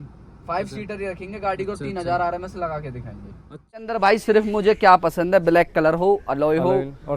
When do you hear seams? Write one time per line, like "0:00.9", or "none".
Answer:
0:03.8